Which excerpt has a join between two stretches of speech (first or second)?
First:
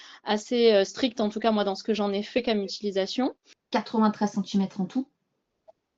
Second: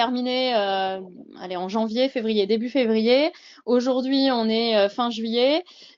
first